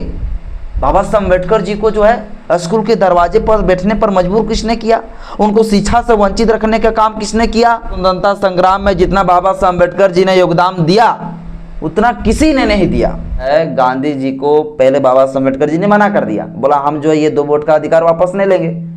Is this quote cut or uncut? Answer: cut